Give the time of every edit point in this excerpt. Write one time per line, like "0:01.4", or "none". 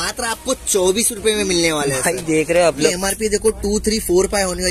0:03.0